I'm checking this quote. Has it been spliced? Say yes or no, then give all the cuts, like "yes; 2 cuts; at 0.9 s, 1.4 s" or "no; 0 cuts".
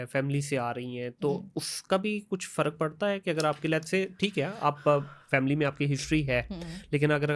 no; 0 cuts